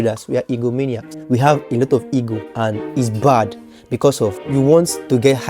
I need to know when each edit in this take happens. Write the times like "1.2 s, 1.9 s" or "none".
1.5 s, 2.4 s, 4.4 s